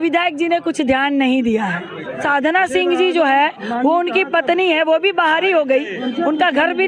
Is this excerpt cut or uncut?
cut